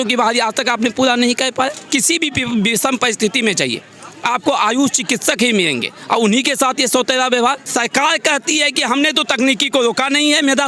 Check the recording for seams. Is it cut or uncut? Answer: cut